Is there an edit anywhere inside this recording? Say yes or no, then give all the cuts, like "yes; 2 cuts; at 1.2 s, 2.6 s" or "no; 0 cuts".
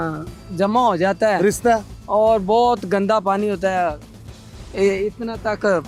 no; 0 cuts